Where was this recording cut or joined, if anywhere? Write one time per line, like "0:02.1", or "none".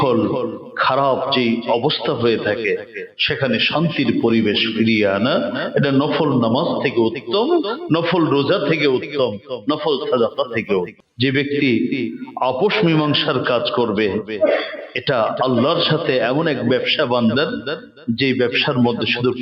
0:11.0